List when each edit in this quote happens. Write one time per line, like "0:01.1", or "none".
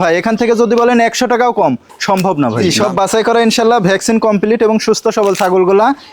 0:02.7